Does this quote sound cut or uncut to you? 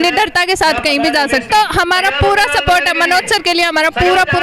uncut